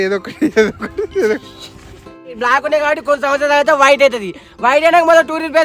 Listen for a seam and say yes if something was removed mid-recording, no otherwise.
yes